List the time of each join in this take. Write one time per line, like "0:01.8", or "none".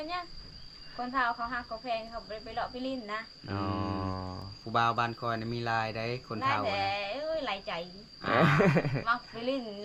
none